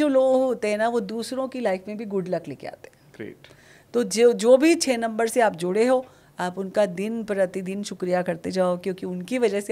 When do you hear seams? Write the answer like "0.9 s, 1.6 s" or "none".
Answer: none